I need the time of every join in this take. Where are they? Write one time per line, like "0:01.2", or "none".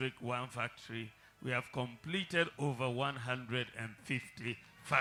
none

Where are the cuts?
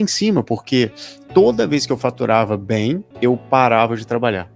0:03.1

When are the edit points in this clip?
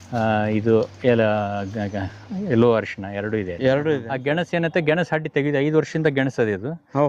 0:04.1

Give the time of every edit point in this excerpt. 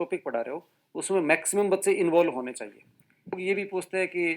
0:03.4

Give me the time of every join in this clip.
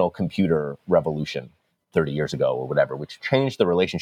0:01.9
0:03.1

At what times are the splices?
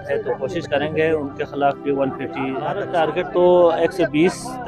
0:02.8

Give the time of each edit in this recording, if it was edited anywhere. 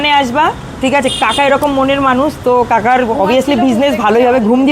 none

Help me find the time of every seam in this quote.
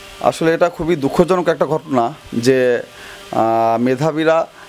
none

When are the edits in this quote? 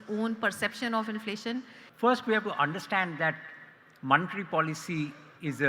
0:01.8

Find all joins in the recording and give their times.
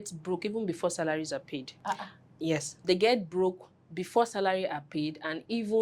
0:01.7
0:02.8

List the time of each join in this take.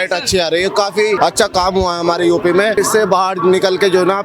0:01.2
0:02.8

